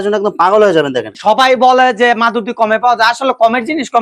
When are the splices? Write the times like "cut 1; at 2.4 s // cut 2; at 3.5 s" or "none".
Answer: cut 1; at 1.1 s